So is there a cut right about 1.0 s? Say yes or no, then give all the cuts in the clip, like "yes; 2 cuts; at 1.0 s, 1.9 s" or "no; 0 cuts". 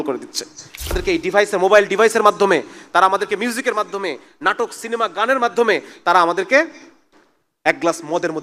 yes; 1 cut; at 1.0 s